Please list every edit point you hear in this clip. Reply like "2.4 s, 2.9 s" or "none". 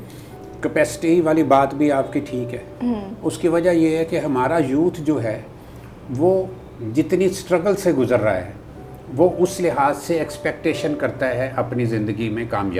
none